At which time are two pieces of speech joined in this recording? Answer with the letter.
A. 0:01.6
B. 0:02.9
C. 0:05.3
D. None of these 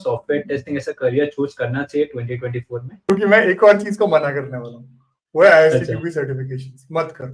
B